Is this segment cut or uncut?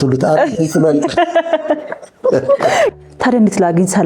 cut